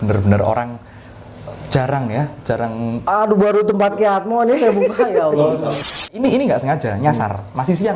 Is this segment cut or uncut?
cut